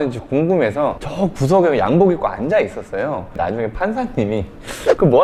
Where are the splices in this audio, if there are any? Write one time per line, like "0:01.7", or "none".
none